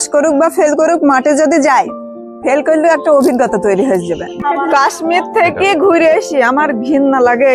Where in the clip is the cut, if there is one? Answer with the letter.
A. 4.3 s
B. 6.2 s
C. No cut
A